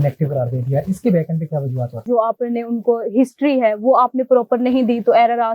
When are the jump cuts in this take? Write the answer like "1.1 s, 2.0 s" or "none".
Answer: 2.0 s

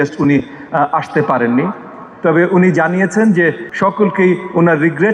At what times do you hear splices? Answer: 3.7 s

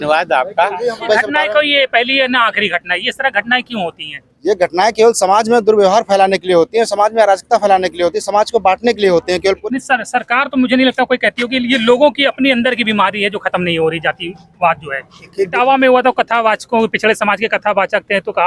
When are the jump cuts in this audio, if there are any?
1.1 s, 9.6 s, 15.5 s

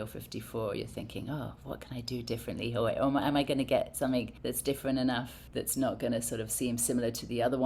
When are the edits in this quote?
4.3 s, 5.4 s

